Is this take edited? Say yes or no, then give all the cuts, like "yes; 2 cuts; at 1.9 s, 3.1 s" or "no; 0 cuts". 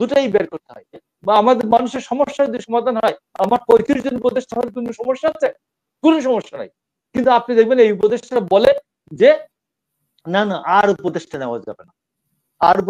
yes; 1 cut; at 1.1 s